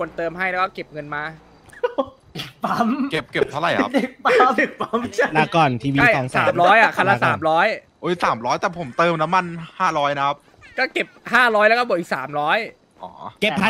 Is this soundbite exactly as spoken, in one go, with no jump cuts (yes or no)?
yes